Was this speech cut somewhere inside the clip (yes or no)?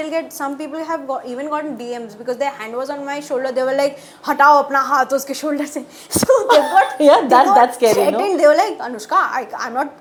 no